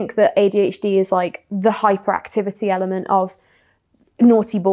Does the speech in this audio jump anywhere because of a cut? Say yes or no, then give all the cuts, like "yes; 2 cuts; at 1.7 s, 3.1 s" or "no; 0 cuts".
no; 0 cuts